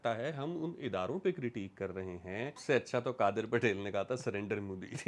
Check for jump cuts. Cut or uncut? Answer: cut